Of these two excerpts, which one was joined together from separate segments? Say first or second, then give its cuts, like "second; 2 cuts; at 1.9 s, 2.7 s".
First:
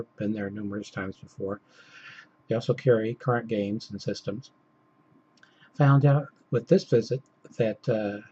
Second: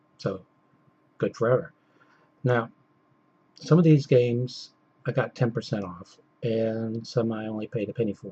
first; 1 cut; at 3.3 s